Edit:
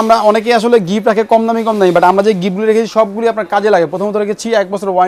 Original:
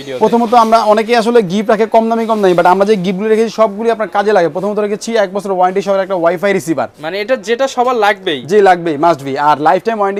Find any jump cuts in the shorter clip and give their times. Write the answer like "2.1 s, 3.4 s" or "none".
none